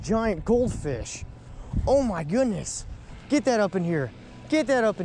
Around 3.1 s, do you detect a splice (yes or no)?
no